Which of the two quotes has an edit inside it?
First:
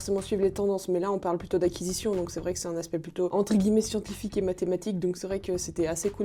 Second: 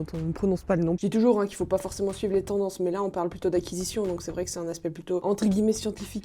second; 1 cut; at 1.0 s

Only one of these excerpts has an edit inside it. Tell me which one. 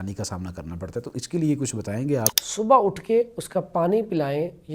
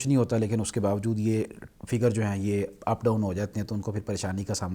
first; 1 cut; at 2.4 s

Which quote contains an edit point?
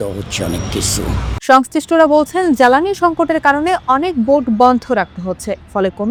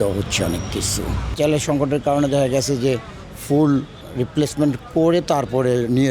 second; 2 cuts; at 1.3 s, 4.0 s

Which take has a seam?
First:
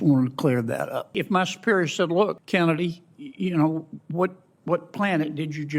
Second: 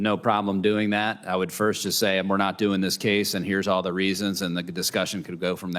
first; 2 cuts; at 1.2 s, 2.4 s

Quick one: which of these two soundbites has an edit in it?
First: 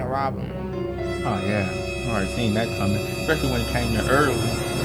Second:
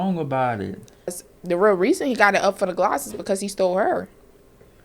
second; 1 cut; at 1.2 s

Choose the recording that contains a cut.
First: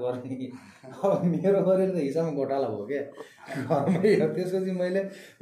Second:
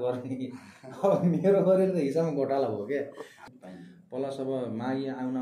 second; 1 cut; at 3.4 s

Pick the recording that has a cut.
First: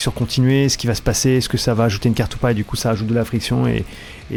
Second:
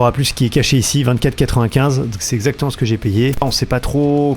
second; 1 cut; at 3.4 s

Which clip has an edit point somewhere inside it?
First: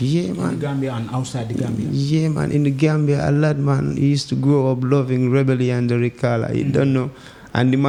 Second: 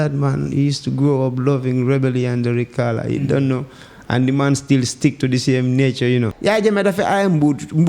second; 1 cut; at 6.3 s

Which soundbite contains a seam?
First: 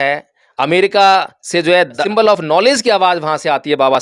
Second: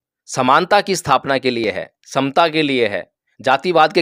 first; 1 cut; at 2.0 s

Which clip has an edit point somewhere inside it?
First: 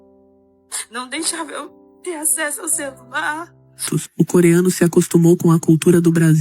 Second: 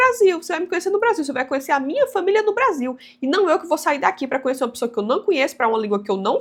first; 1 cut; at 4.0 s

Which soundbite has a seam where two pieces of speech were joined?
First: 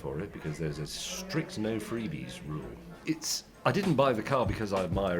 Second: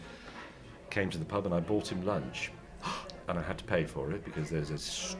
first; 1 cut; at 2.9 s

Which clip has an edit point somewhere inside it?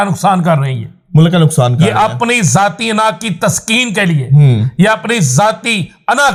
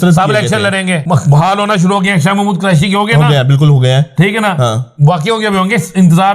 second; 1 cut; at 1.0 s

